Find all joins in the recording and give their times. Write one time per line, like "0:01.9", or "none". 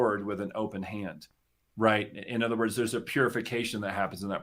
none